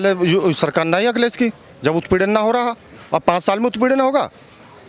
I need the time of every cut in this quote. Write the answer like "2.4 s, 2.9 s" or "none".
none